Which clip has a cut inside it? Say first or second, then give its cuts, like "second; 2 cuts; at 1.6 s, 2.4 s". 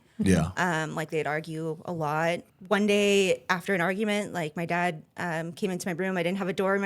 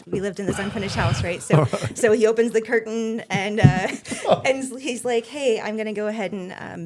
first; 1 cut; at 2.5 s